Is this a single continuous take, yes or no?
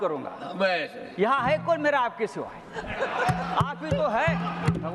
yes